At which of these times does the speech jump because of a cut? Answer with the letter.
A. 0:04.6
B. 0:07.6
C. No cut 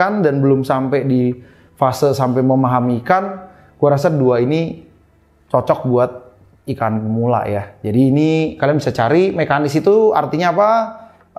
C